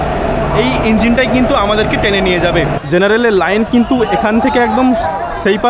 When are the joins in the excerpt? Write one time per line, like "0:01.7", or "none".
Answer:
0:02.8